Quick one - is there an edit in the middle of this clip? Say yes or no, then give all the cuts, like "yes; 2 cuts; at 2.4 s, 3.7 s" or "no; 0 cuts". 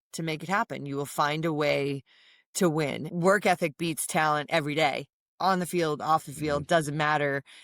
yes; 1 cut; at 3.0 s